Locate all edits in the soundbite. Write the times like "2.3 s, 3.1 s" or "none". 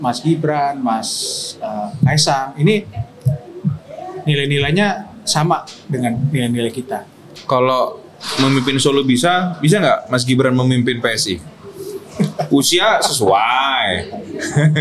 none